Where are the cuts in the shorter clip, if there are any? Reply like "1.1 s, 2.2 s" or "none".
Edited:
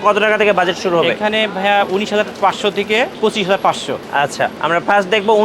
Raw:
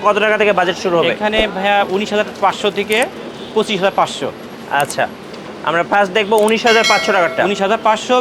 3.1 s, 4.2 s